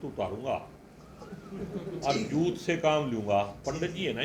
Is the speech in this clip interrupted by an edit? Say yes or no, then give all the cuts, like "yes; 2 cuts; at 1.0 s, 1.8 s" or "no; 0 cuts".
no; 0 cuts